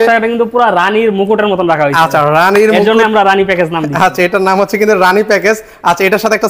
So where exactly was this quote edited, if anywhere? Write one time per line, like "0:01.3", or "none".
none